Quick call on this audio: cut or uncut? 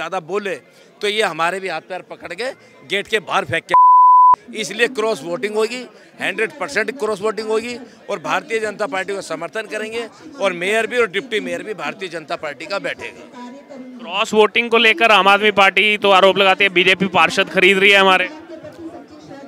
uncut